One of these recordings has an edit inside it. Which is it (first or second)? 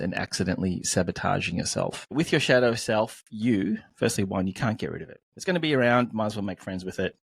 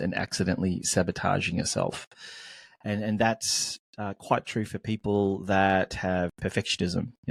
first